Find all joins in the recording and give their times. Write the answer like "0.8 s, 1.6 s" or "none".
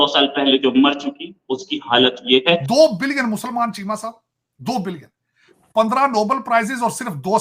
2.6 s